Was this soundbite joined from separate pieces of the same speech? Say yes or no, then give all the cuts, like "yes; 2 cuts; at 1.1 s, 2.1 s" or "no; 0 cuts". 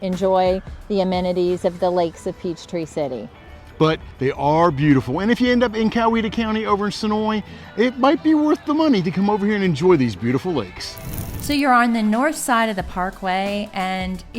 no; 0 cuts